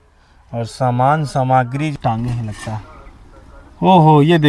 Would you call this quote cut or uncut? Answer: cut